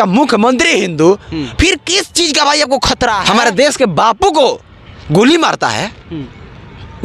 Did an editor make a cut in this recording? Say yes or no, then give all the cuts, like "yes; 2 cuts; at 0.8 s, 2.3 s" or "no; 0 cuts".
yes; 1 cut; at 3.2 s